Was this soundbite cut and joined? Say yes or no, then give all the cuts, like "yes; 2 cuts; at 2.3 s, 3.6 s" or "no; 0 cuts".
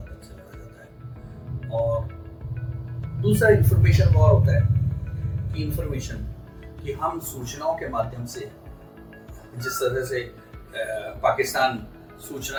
no; 0 cuts